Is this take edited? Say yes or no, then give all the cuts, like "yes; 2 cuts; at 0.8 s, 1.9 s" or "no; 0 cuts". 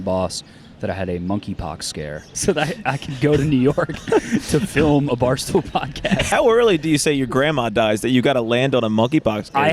yes; 2 cuts; at 2.3 s, 6.2 s